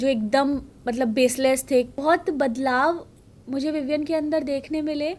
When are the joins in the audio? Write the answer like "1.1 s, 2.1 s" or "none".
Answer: 2.0 s